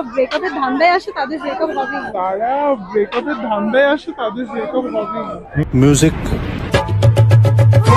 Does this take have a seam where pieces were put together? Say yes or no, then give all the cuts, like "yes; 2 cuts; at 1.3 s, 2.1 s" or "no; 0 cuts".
no; 0 cuts